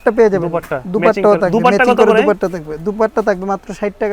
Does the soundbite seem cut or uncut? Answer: uncut